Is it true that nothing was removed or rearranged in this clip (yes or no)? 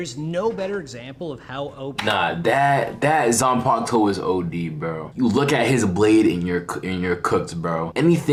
yes